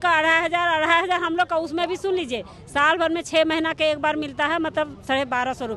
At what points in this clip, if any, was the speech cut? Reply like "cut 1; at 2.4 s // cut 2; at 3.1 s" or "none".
none